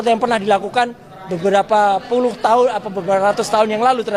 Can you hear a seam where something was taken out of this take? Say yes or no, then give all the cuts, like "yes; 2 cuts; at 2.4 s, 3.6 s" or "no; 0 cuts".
no; 0 cuts